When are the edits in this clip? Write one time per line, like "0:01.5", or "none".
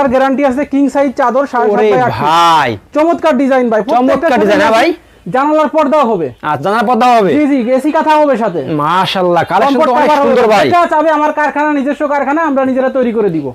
none

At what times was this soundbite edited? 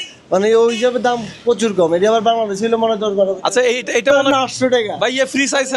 0:04.1

